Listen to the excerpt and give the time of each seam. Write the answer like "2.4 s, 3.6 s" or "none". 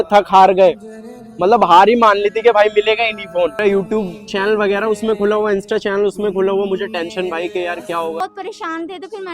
3.6 s, 8.2 s